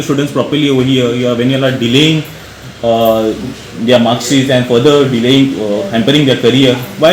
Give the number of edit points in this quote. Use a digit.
0